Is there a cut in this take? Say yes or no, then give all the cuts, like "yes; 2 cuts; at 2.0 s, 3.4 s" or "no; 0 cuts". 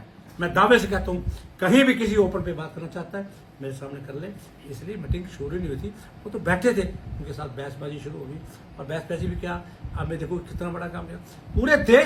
no; 0 cuts